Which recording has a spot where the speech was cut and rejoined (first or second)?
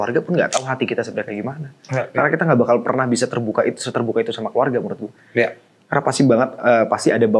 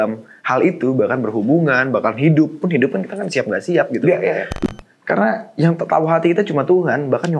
second